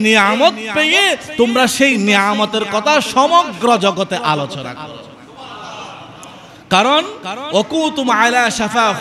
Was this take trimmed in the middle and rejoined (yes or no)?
no